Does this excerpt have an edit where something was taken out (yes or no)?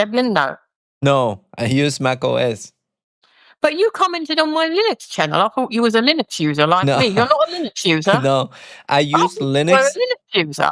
no